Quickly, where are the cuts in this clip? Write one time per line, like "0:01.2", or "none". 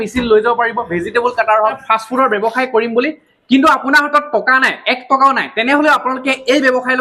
0:01.8